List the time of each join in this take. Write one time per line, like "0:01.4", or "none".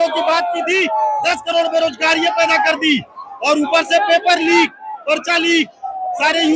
none